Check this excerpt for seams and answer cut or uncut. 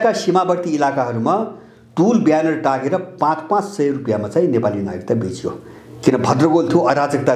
uncut